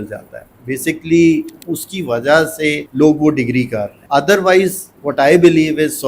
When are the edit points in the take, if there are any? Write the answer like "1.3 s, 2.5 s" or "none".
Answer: 2.8 s, 3.9 s, 4.9 s